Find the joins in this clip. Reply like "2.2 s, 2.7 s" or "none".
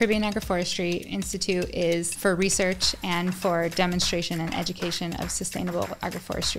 2.1 s